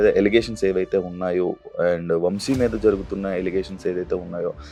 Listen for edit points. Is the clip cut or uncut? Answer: uncut